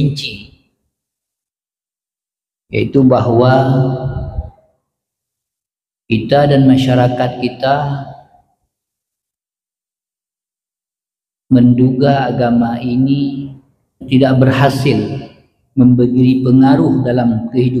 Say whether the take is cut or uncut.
cut